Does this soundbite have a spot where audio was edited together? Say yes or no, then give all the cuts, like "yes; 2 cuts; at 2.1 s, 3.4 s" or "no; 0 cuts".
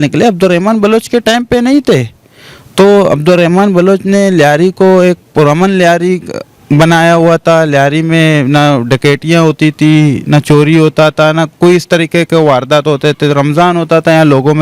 no; 0 cuts